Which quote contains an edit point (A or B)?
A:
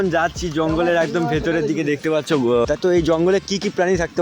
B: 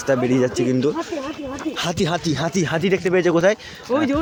A